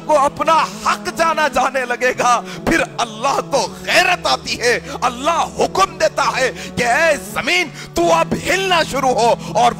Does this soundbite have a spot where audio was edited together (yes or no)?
no